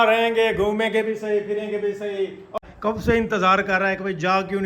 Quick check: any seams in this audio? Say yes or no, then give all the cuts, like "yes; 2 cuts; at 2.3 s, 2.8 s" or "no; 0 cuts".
yes; 1 cut; at 2.6 s